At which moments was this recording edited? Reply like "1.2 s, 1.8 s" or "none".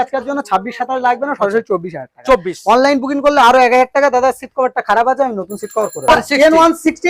6.1 s